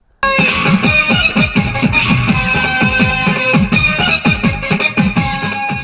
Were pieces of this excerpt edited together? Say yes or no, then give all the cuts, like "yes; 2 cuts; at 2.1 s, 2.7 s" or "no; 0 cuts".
no; 0 cuts